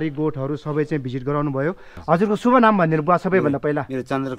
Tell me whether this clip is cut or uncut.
cut